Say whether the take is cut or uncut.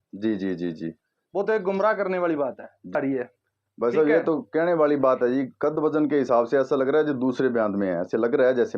cut